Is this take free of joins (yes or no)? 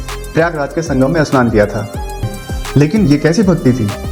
no